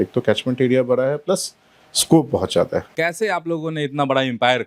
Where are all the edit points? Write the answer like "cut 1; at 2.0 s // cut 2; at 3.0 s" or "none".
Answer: cut 1; at 2.9 s